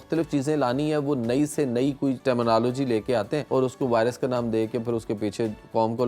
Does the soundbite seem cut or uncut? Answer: cut